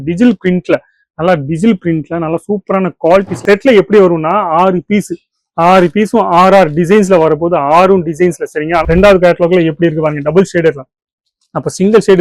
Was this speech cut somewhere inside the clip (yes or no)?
yes